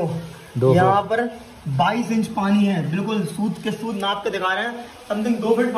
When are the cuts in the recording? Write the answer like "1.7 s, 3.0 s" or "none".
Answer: none